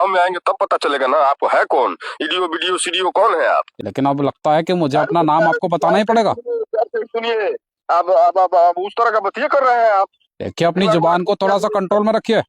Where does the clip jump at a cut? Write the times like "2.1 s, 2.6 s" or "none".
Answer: 3.8 s